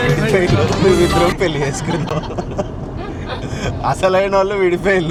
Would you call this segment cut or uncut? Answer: uncut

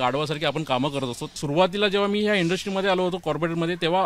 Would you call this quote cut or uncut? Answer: cut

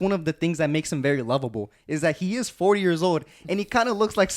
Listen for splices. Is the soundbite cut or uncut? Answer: uncut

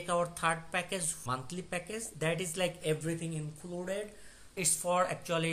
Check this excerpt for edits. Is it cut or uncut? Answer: cut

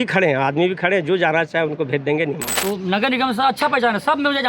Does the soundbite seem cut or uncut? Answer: cut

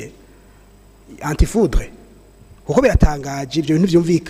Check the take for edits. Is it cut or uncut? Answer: uncut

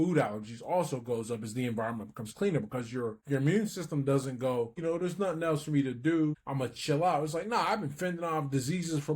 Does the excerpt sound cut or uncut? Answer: cut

